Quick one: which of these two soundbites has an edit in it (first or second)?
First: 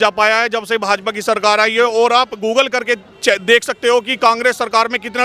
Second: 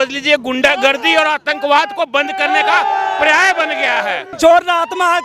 second